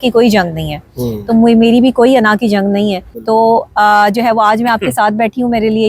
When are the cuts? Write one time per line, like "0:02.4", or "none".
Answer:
0:03.1